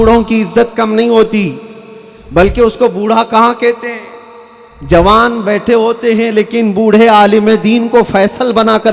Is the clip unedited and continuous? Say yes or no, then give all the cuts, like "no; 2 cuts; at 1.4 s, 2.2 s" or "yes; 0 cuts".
yes; 0 cuts